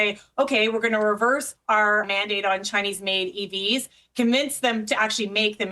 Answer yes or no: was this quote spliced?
yes